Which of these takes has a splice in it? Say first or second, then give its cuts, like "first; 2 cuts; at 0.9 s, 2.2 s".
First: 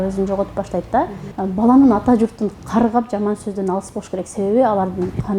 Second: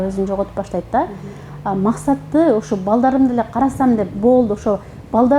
first; 1 cut; at 1.2 s